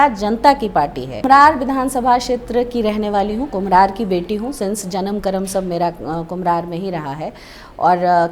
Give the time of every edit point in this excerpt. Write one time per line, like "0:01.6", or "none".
0:01.1